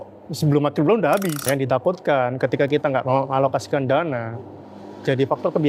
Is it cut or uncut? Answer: cut